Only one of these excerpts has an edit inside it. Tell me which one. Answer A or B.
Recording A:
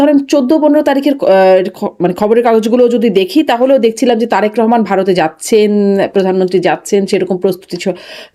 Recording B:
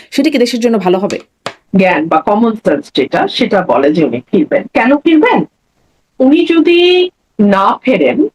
B